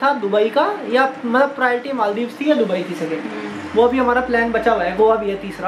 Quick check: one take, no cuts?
yes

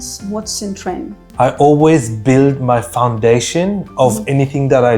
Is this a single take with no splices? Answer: no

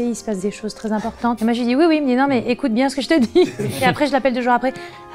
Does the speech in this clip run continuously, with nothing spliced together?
yes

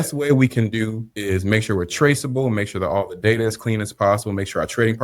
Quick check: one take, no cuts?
no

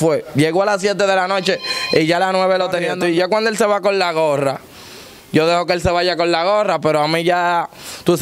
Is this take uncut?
no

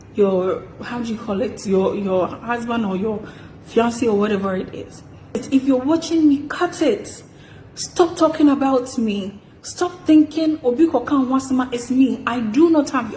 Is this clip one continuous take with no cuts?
no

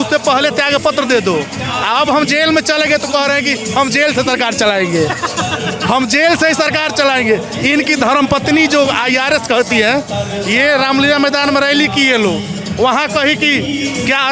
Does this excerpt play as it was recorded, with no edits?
yes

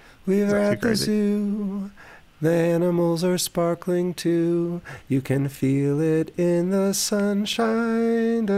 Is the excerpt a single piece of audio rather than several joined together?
yes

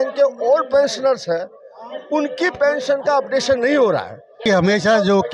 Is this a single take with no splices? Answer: no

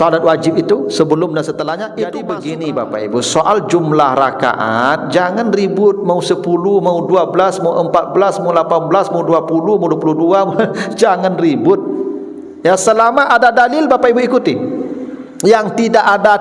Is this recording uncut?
no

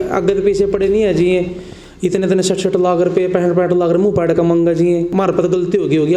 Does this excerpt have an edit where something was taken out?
yes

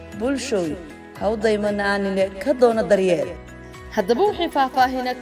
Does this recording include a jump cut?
no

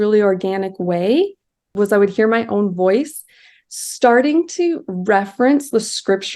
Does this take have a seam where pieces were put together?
yes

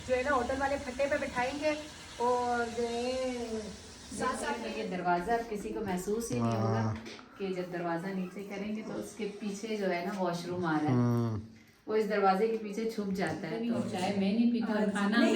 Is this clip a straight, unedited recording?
no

